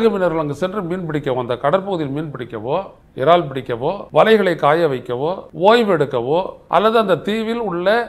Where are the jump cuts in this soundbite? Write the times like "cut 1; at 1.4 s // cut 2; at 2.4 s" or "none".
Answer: cut 1; at 3.0 s // cut 2; at 4.0 s // cut 3; at 5.4 s // cut 4; at 6.6 s